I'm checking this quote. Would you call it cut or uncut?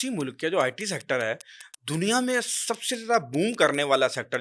uncut